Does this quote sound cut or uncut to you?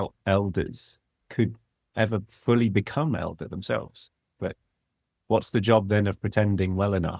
cut